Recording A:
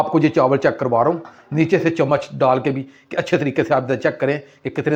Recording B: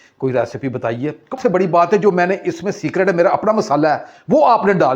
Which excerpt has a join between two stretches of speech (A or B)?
B